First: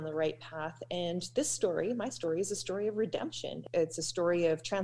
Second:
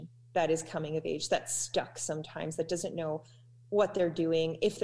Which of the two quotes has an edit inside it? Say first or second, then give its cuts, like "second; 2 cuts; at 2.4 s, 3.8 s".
first; 1 cut; at 3.6 s